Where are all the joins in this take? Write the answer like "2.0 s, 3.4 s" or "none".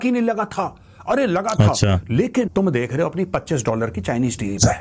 2.5 s